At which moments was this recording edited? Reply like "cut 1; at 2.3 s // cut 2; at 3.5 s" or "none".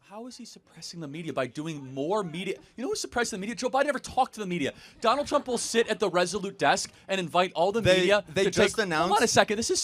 cut 1; at 8.3 s